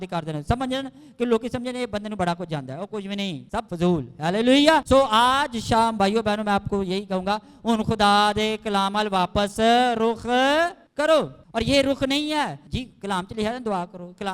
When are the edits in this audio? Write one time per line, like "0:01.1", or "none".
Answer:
0:03.5
0:04.8
0:10.8
0:11.4
0:12.6